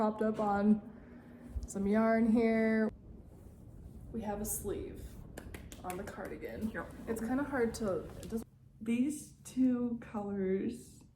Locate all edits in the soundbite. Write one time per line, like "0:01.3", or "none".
0:02.9
0:08.5